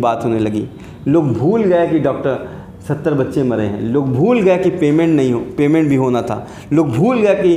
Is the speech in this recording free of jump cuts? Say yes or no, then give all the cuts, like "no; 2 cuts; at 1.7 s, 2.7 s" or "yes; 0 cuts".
yes; 0 cuts